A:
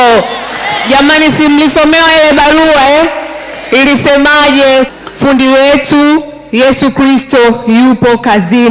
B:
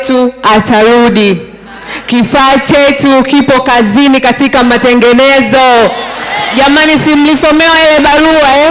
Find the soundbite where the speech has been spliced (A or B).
A